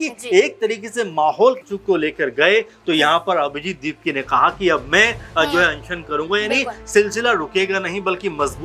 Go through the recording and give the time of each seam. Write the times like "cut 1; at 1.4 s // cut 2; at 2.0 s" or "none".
cut 1; at 1.7 s